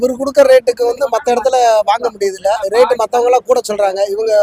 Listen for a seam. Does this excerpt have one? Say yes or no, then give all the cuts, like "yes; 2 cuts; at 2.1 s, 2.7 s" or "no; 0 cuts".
no; 0 cuts